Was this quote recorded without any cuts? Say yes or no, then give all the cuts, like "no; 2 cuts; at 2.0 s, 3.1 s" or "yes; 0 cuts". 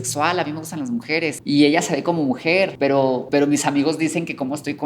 no; 2 cuts; at 1.4 s, 3.1 s